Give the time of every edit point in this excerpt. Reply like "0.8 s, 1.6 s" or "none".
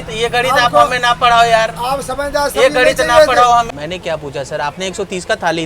3.7 s